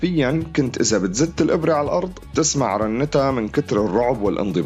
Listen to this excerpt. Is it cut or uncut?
uncut